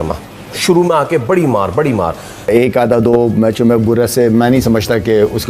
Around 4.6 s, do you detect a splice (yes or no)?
no